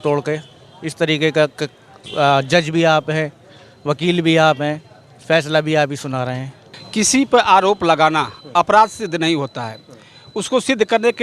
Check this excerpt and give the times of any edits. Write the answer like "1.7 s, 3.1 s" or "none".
6.8 s